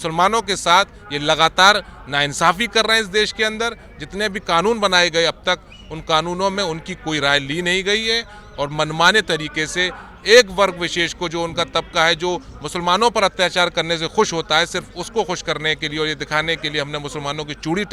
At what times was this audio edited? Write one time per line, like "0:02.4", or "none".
none